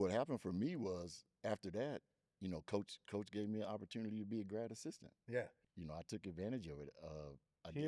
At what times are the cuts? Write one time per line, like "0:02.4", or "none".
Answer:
0:05.7